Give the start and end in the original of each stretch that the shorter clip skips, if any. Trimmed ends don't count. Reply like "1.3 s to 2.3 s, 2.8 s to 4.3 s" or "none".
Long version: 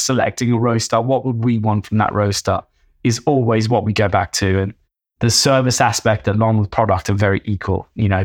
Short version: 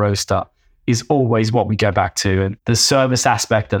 4.7 s to 5.1 s